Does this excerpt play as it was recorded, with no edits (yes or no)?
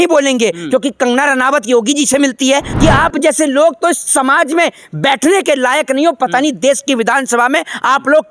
no